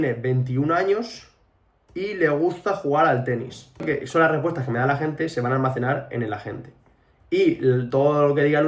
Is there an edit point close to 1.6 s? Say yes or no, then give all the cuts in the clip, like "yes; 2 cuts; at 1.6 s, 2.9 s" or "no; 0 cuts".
no; 1 cut; at 3.8 s